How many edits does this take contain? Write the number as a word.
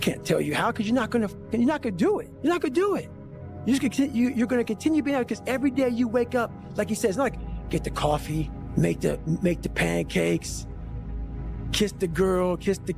two